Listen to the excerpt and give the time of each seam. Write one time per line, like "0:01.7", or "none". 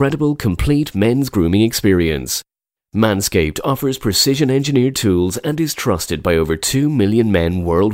none